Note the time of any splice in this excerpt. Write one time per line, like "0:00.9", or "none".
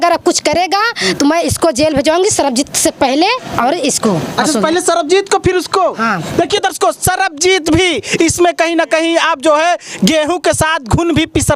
none